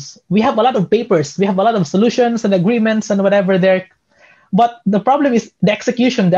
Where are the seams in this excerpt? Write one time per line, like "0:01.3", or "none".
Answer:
none